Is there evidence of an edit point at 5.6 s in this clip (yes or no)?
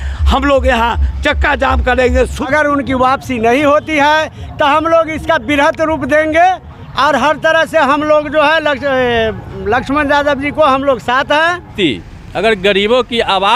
no